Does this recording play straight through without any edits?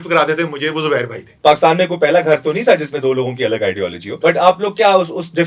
no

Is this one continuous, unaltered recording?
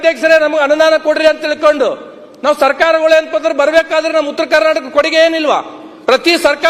yes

